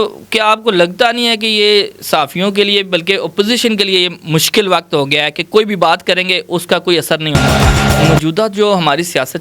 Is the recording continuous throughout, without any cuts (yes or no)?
no